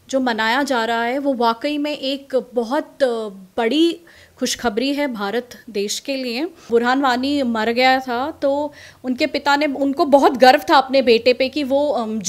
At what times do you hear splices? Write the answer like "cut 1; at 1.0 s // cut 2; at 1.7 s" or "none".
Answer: cut 1; at 6.7 s